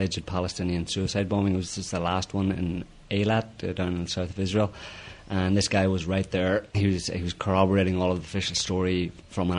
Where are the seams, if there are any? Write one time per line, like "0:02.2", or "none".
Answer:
0:01.8